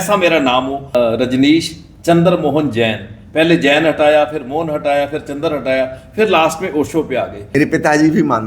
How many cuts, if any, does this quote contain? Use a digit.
2